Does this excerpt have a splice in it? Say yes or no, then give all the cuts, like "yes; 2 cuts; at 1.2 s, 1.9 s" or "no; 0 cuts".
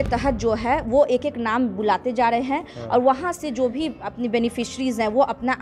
no; 0 cuts